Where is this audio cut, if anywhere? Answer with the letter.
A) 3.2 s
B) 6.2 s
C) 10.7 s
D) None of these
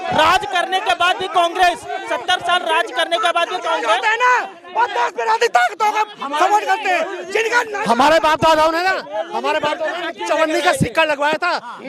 D